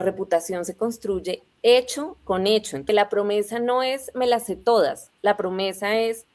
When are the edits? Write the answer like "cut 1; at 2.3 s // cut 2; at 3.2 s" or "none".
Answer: cut 1; at 2.8 s